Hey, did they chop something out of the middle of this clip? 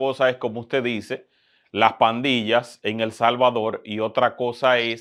no; 0 cuts

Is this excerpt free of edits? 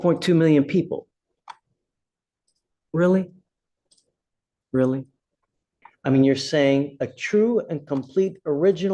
no; 1 cut; at 5.8 s

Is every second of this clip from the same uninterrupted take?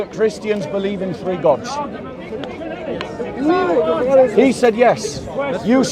yes; 0 cuts

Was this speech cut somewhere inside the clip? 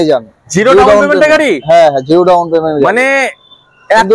no; 0 cuts

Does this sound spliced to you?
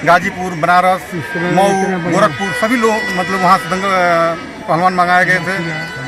no; 0 cuts

